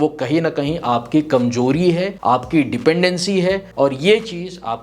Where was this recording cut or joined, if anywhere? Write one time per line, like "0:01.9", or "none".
0:02.1
0:03.7